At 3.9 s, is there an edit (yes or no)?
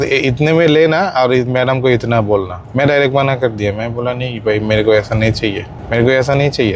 no